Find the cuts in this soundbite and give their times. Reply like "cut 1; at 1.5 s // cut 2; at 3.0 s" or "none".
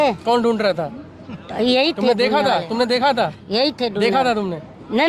none